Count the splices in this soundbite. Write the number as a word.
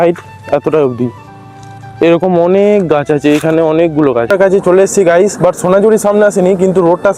one